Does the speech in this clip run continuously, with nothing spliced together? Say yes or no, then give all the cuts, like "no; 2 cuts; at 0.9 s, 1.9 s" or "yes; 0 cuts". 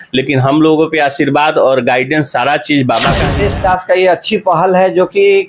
no; 1 cut; at 3.3 s